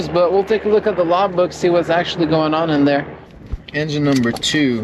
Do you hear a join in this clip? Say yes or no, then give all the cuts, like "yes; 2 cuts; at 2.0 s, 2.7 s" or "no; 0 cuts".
yes; 1 cut; at 3.1 s